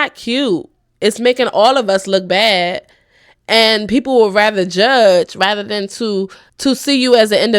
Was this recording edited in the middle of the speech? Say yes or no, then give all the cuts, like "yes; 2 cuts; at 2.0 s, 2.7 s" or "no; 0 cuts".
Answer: yes; 1 cut; at 6.4 s